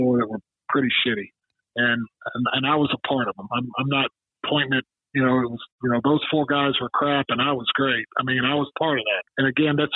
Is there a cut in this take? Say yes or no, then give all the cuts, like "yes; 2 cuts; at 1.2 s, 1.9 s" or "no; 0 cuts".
no; 0 cuts